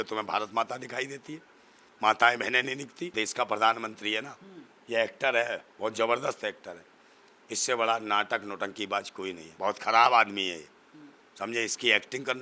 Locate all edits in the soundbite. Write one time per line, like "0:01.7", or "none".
0:03.1
0:09.4